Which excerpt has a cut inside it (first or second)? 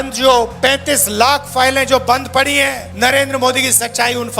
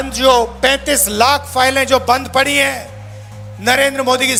first